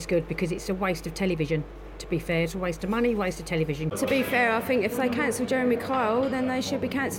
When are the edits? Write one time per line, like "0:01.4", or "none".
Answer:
0:03.9

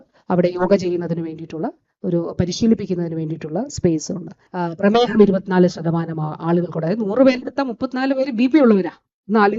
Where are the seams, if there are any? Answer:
0:04.4

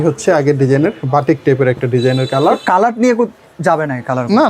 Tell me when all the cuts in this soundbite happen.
none

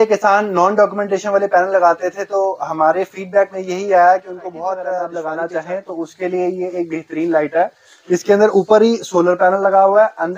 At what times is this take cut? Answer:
0:05.0

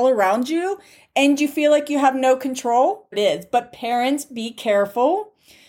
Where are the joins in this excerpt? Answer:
0:03.1

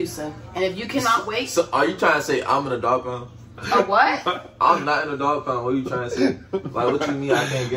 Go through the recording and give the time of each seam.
none

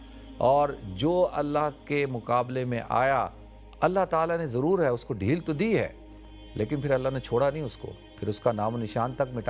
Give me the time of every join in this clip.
none

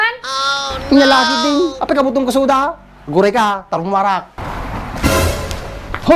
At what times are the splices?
0:04.4

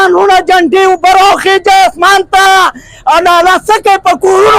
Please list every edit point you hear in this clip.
none

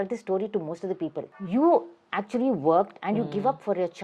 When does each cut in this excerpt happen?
0:01.4

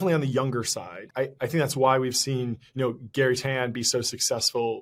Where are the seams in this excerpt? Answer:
0:01.0

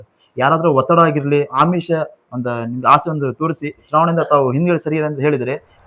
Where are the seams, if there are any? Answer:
0:01.5
0:03.8

